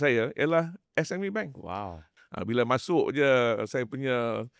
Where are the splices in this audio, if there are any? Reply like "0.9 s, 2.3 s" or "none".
2.0 s